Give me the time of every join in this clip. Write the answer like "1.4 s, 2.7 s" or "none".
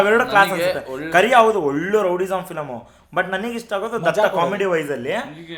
none

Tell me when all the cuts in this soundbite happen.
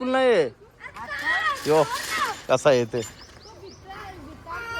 none

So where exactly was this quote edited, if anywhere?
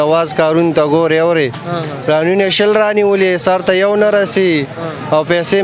none

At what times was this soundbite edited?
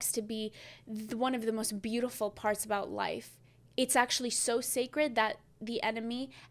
none

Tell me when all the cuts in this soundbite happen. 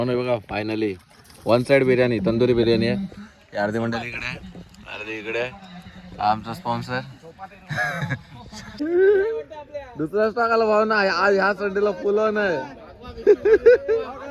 8.8 s

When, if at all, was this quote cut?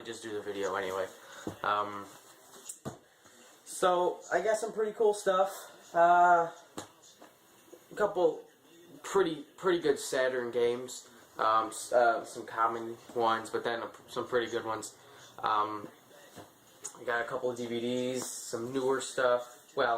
7.6 s

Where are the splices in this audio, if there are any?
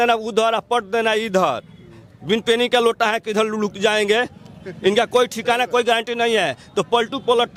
none

